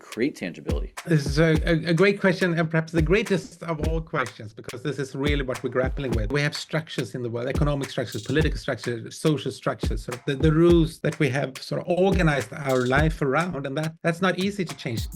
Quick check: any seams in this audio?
yes; 3 cuts; at 0.9 s, 6.3 s, 10.9 s

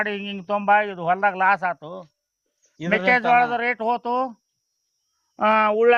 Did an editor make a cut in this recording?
no; 0 cuts

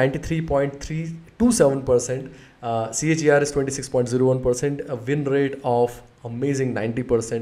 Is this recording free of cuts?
yes; 0 cuts

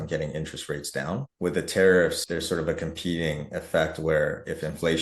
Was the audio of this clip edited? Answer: yes; 2 cuts; at 1.3 s, 2.2 s

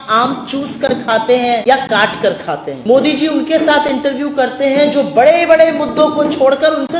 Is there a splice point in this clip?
yes; 2 cuts; at 1.6 s, 2.7 s

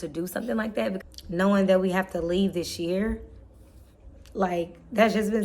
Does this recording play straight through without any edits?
no; 1 cut; at 1.0 s

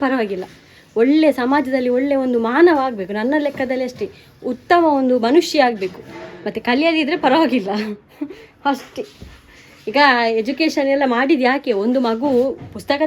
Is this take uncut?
yes; 0 cuts

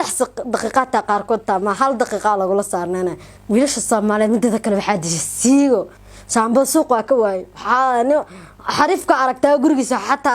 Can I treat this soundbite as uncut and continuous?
no; 2 cuts; at 3.3 s, 6.1 s

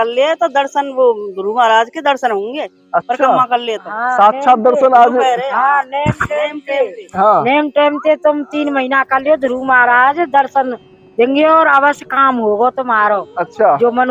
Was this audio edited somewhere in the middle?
no; 0 cuts

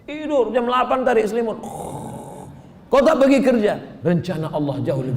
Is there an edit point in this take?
no; 0 cuts

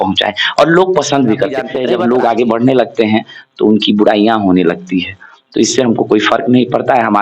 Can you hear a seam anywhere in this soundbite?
yes; 1 cut; at 1.7 s

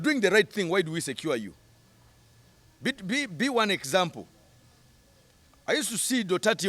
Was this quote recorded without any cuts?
yes; 0 cuts

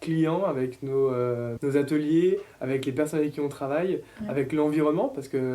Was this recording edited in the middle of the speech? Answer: yes; 1 cut; at 1.5 s

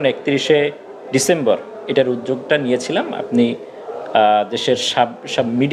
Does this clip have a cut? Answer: no; 0 cuts

